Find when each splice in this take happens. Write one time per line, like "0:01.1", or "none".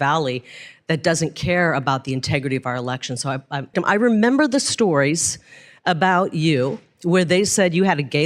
0:03.7